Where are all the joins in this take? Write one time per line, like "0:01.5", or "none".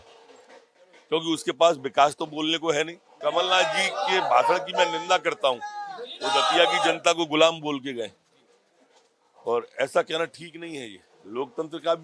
0:03.1